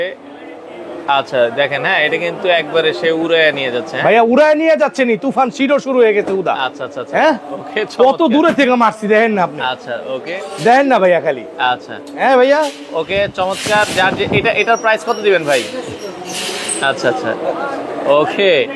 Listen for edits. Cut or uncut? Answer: uncut